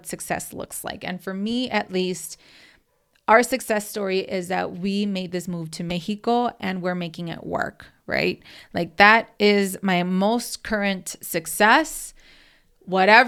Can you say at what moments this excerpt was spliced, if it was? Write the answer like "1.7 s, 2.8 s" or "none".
none